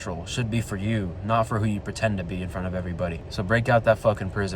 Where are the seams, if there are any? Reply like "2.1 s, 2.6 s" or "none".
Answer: 3.2 s